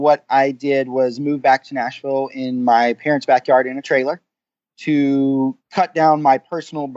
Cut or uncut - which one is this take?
cut